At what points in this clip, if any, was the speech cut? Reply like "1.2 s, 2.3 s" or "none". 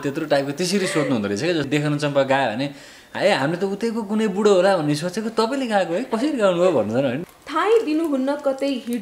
1.7 s, 7.2 s